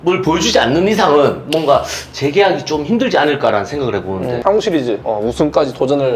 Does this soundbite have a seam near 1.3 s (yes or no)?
no